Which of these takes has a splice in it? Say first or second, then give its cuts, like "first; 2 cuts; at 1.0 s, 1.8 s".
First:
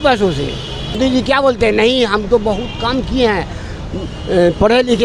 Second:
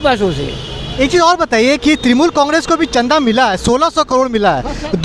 first; 1 cut; at 1.0 s